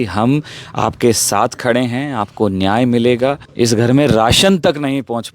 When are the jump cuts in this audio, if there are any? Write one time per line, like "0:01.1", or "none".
0:03.5